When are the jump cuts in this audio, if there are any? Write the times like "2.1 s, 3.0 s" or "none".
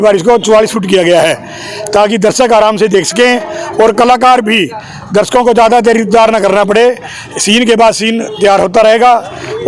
none